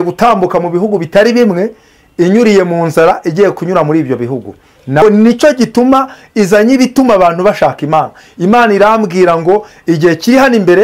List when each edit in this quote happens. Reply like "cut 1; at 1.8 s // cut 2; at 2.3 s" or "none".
cut 1; at 5.0 s